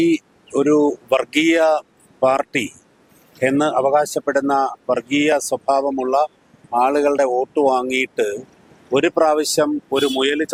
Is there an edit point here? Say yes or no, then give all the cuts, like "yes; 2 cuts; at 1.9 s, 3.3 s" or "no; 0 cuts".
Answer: no; 0 cuts